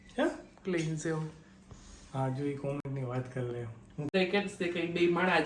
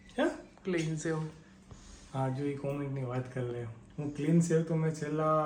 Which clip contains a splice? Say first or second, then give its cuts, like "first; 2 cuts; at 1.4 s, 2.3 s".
first; 1 cut; at 4.1 s